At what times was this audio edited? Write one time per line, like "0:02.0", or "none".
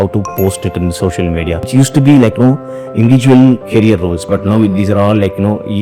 0:01.7